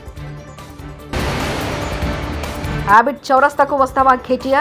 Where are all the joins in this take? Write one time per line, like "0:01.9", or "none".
0:01.1
0:02.8